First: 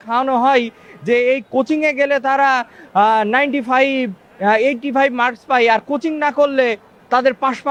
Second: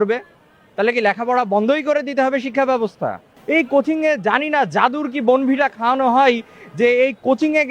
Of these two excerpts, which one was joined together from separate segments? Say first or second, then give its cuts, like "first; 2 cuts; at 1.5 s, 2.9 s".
second; 1 cut; at 3.3 s